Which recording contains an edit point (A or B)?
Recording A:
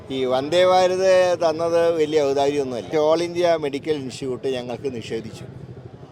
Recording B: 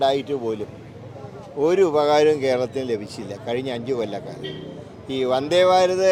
A